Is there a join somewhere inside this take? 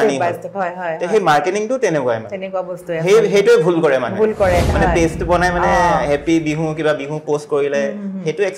yes; 1 cut; at 4.7 s

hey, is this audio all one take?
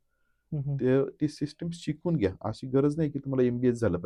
yes; 0 cuts

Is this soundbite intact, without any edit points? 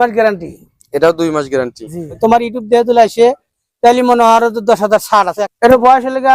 no; 2 cuts; at 2.1 s, 5.4 s

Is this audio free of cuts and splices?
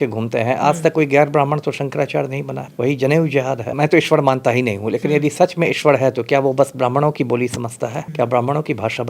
no; 3 cuts; at 2.6 s, 3.7 s, 8.0 s

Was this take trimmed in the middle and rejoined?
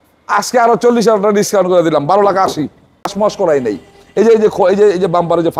yes; 1 cut; at 3.1 s

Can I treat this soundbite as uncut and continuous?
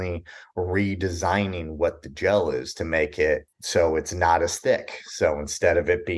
yes; 0 cuts

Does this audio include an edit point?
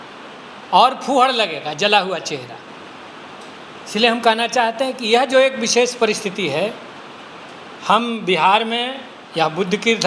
no; 0 cuts

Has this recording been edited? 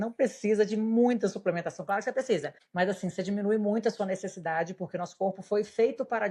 yes; 1 cut; at 2.6 s

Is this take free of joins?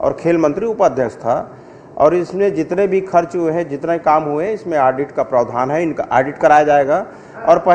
yes; 0 cuts

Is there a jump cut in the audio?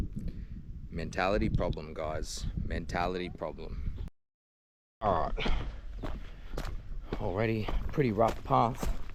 no; 0 cuts

